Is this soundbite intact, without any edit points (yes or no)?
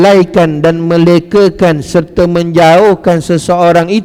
yes